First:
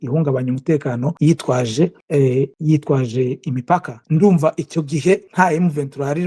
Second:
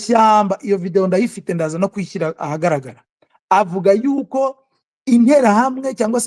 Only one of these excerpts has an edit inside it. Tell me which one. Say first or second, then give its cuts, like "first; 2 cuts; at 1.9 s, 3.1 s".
first; 4 cuts; at 1.1 s, 2.3 s, 4.0 s, 5.3 s